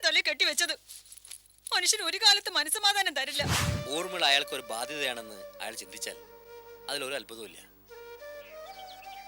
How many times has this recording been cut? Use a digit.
1